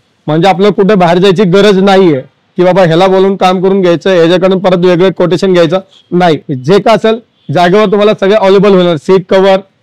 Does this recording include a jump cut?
no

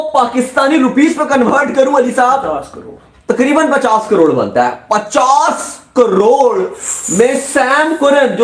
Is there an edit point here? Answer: no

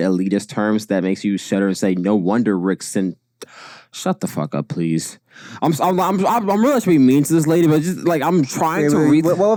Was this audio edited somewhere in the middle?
no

